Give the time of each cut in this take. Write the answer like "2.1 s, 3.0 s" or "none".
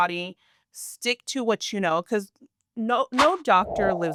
none

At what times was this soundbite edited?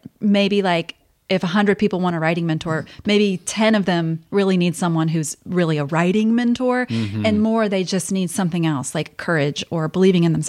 none

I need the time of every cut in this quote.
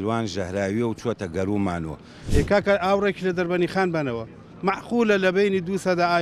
2.2 s

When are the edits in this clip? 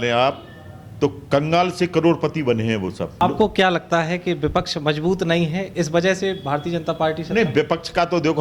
3.2 s

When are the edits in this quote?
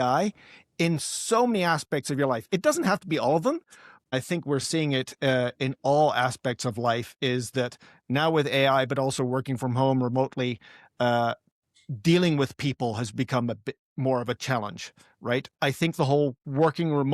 4.0 s, 15.5 s

